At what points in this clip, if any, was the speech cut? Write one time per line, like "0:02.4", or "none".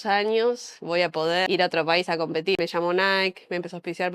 0:01.5
0:02.6